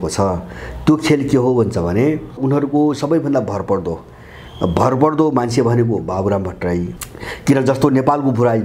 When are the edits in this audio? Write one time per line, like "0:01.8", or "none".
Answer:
0:02.4
0:06.9

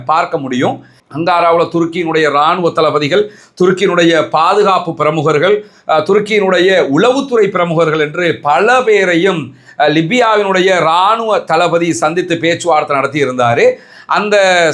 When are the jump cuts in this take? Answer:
0:01.0

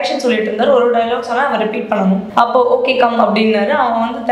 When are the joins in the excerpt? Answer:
0:02.3

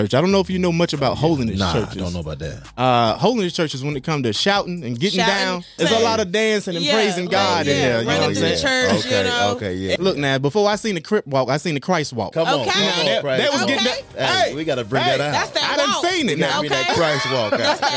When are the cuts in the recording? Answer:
0:05.8
0:09.9

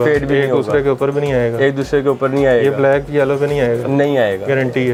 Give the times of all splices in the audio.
none

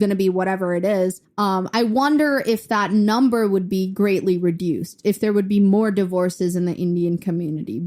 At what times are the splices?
0:01.2

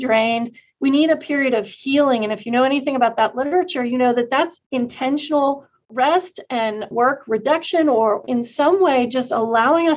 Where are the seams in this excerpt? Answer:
0:04.6
0:06.9
0:08.2

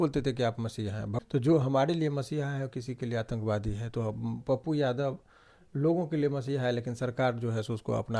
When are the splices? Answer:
0:01.1

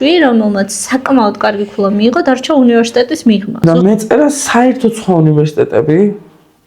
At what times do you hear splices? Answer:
0:03.6

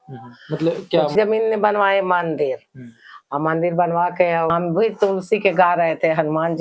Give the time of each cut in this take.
0:01.1
0:04.5

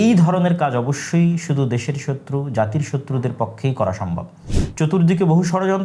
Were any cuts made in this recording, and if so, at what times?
0:04.6

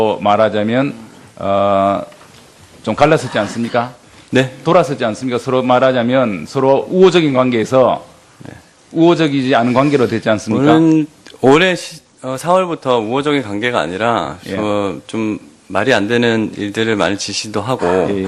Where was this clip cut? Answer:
none

